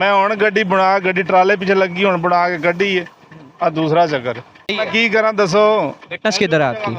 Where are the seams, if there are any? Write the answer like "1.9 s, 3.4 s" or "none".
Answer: 4.7 s